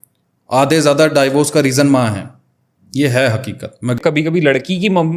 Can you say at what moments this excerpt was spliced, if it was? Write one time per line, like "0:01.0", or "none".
0:04.0